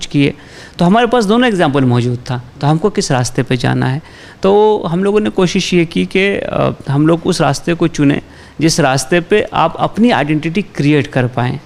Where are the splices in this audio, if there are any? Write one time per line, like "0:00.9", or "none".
none